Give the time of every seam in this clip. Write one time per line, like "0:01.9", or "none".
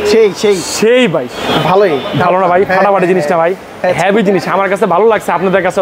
0:01.4